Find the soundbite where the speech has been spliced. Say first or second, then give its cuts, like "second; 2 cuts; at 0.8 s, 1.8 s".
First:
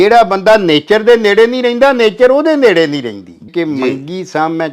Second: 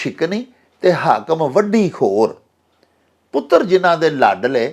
first; 1 cut; at 3.5 s